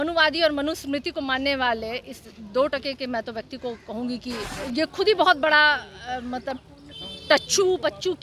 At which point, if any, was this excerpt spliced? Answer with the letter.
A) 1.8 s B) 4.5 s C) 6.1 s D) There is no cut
B